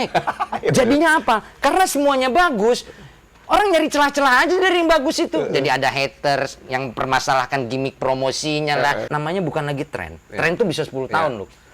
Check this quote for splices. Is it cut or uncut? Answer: cut